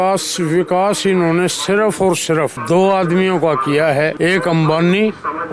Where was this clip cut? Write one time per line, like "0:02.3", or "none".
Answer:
0:02.6
0:04.1